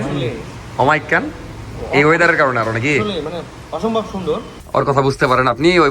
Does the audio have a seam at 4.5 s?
yes; 1 cut; at 4.5 s

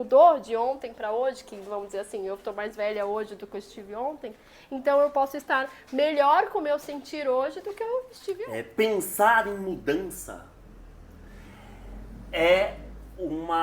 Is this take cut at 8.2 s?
yes; 1 cut; at 8.2 s

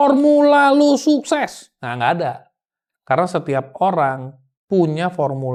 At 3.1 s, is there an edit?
no; 0 cuts

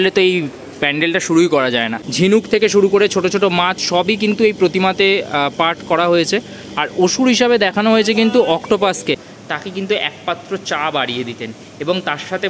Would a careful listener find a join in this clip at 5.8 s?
no; 2 cuts; at 2.3 s, 9.3 s

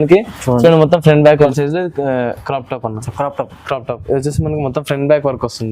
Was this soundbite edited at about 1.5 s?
yes; 1 cut; at 1.5 s

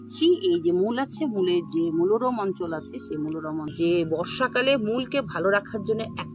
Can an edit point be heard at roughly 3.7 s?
yes; 1 cut; at 3.7 s

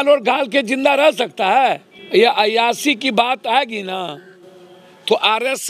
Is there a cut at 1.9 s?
yes; 1 cut; at 1.9 s

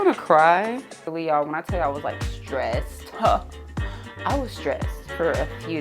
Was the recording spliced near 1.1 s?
yes; 1 cut; at 1.1 s

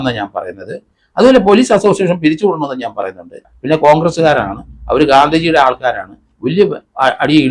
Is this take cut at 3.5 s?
yes; 1 cut; at 3.5 s

